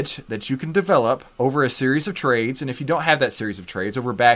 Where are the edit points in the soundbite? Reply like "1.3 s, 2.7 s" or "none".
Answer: 1.3 s